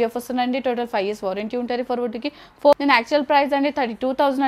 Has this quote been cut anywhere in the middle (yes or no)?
yes